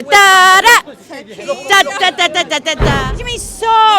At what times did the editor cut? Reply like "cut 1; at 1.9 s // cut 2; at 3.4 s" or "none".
cut 1; at 2.9 s